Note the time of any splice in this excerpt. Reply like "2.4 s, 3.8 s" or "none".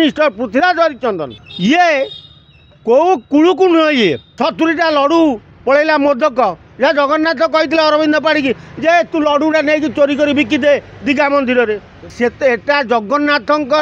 1.4 s, 4.3 s, 12.1 s